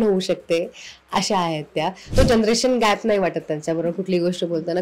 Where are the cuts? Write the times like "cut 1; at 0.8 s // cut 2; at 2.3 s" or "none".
cut 1; at 2.1 s